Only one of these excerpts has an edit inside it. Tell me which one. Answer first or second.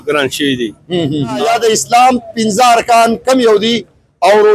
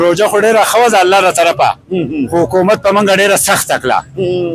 first